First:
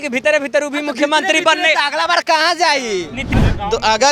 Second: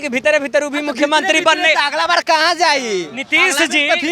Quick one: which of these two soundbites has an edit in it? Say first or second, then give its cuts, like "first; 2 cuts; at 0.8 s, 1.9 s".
first; 1 cut; at 3.2 s